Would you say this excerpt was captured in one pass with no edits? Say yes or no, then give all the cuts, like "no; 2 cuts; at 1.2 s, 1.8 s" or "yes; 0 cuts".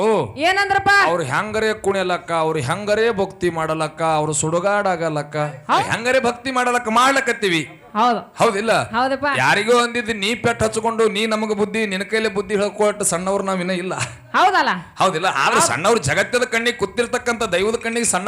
no; 1 cut; at 5.8 s